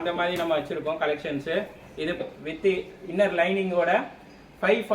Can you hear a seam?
yes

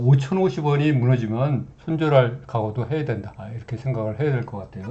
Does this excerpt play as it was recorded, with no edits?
yes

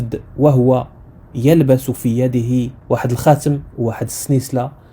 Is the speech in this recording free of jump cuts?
no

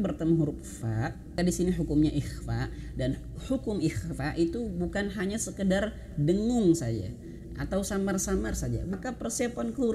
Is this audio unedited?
no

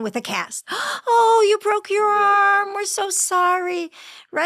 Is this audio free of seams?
yes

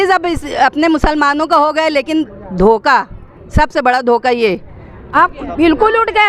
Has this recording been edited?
yes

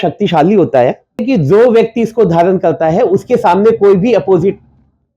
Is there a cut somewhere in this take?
yes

